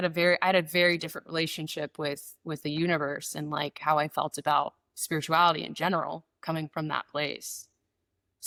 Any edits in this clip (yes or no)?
no